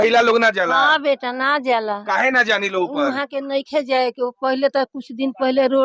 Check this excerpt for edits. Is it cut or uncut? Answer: uncut